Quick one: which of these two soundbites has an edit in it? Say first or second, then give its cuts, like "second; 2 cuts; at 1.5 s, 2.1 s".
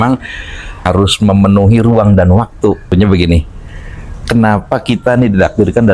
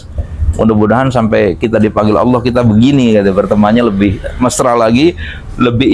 first; 2 cuts; at 0.8 s, 2.9 s